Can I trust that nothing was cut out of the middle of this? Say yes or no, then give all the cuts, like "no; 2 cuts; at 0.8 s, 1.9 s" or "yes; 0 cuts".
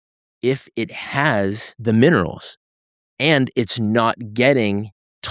no; 1 cut; at 1.7 s